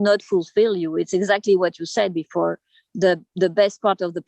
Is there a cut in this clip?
no; 0 cuts

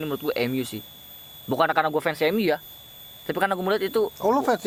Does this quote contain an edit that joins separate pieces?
no; 0 cuts

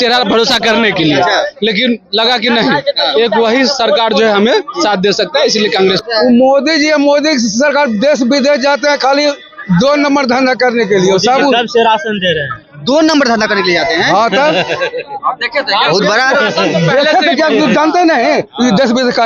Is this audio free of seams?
no; 1 cut; at 6.0 s

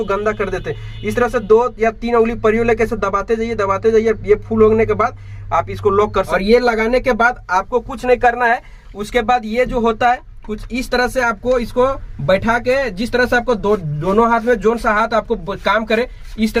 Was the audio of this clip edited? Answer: no; 0 cuts

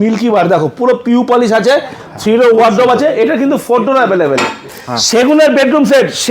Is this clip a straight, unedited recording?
no; 1 cut; at 4.8 s

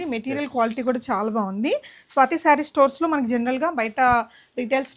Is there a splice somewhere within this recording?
no; 0 cuts

